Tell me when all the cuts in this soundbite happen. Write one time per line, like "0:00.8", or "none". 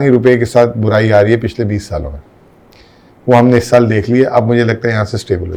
none